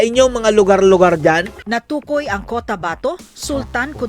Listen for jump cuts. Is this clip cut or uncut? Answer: cut